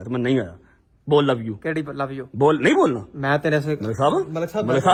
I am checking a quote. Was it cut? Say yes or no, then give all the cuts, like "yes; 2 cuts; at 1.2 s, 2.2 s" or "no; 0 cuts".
no; 0 cuts